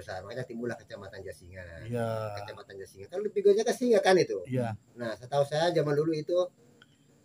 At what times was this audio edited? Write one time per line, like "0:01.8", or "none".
none